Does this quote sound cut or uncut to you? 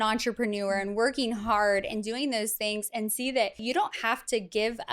cut